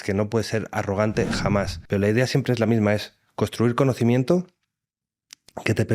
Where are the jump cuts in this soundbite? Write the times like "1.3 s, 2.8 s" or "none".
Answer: 1.8 s

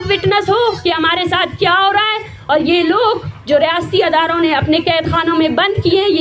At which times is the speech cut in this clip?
none

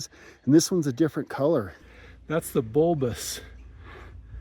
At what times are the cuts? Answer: 1.7 s

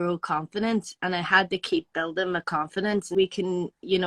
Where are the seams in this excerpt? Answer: 3.1 s

